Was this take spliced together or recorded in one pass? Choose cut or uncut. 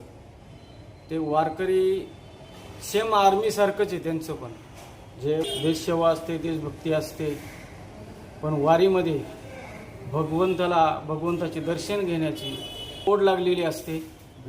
cut